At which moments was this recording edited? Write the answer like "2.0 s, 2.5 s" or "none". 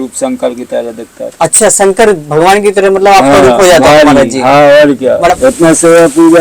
5.3 s